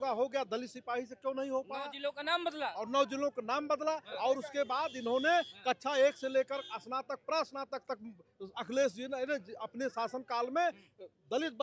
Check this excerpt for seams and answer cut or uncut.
uncut